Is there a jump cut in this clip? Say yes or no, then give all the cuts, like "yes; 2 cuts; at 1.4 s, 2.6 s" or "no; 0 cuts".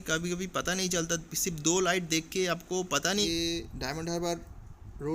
yes; 1 cut; at 3.2 s